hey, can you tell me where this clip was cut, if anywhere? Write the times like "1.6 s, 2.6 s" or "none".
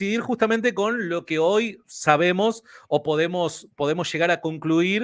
none